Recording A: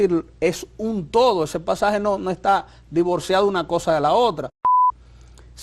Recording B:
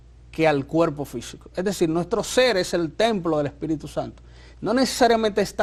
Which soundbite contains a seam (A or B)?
A